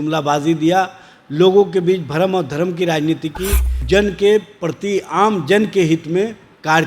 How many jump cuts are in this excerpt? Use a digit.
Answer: 1